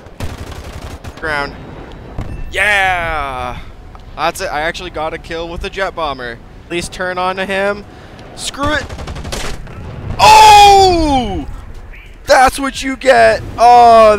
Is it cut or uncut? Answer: cut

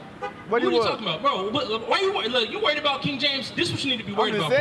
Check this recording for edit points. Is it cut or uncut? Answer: uncut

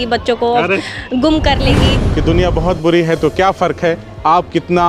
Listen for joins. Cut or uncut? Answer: cut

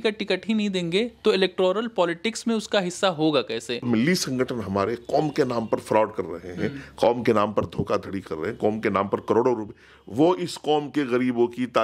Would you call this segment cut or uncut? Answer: cut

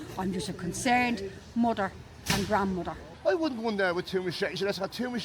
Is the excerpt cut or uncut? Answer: cut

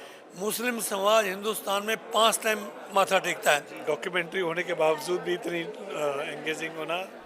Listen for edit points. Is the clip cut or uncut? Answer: cut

